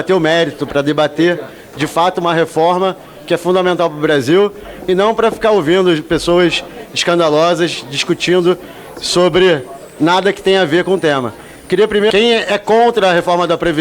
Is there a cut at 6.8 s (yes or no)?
no